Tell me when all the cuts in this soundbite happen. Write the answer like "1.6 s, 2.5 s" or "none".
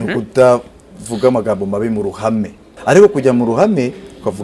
2.7 s